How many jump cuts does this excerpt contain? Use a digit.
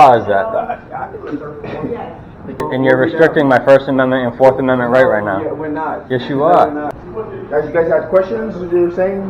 2